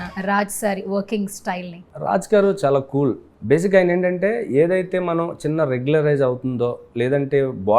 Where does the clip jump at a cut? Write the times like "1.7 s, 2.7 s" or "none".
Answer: 3.3 s